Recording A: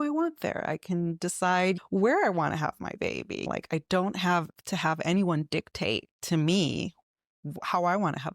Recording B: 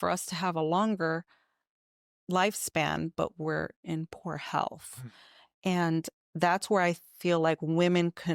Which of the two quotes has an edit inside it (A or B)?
A